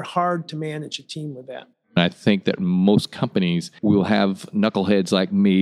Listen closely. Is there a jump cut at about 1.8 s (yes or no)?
yes